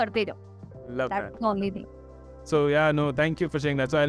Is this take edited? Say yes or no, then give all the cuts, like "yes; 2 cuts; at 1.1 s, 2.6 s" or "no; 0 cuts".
no; 0 cuts